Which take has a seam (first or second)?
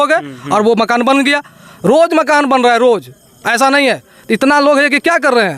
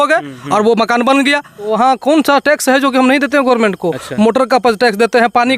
second